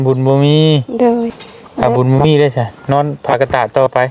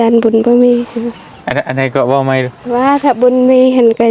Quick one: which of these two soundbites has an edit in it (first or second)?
first